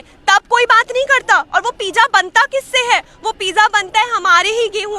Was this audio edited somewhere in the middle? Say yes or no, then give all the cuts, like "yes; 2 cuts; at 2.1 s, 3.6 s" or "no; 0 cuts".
no; 0 cuts